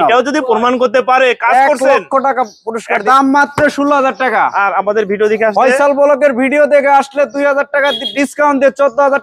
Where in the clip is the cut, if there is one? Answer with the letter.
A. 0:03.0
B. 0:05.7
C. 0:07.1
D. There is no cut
A